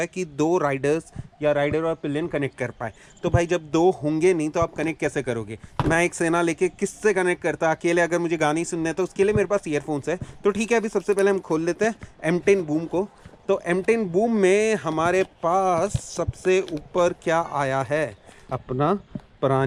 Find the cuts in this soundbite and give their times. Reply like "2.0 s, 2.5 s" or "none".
none